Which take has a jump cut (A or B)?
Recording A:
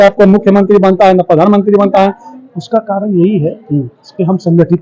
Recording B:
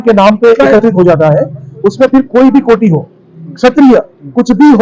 A